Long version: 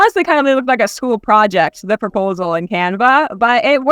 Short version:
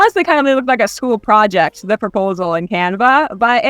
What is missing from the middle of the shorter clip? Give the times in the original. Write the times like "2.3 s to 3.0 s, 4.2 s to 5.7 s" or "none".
none